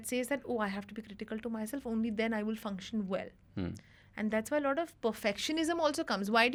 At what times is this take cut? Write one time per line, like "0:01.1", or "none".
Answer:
none